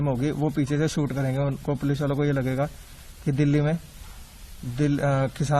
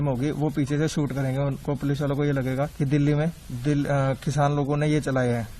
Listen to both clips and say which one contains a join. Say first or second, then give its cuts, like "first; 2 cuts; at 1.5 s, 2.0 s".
second; 2 cuts; at 2.7 s, 3.5 s